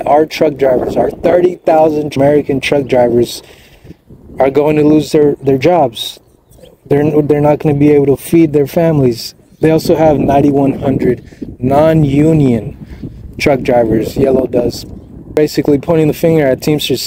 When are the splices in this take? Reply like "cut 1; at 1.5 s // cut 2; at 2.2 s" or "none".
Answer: cut 1; at 2.1 s // cut 2; at 15.4 s